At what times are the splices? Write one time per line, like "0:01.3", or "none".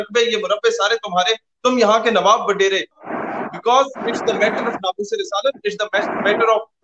0:03.1

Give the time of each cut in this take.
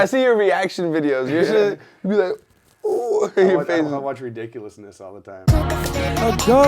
0:05.4

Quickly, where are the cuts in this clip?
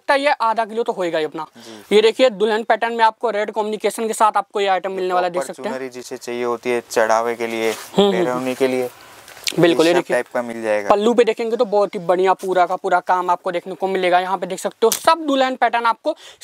none

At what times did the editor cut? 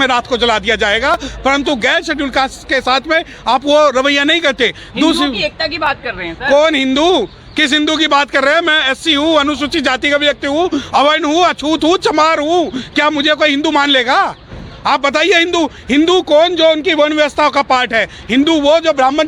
none

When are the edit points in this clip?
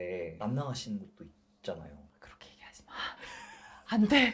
none

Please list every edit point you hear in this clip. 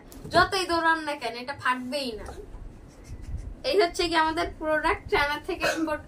none

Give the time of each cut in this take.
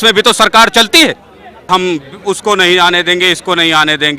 0:01.5

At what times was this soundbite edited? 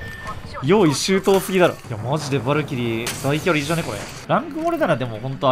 0:01.8
0:04.1

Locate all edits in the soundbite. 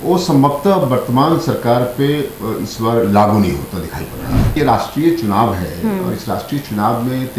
0:04.6

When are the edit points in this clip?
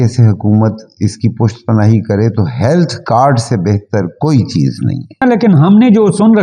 0:05.2

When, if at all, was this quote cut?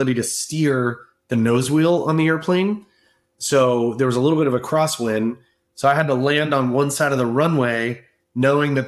none

